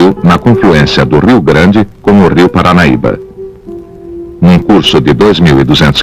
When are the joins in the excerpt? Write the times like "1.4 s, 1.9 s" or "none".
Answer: 4.9 s